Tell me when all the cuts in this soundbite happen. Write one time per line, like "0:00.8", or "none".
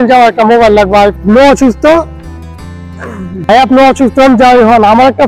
0:01.2